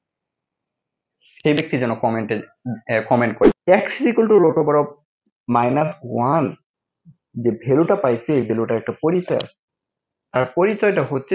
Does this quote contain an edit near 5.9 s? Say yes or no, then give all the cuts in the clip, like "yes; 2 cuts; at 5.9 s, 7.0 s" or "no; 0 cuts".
no; 1 cut; at 3.6 s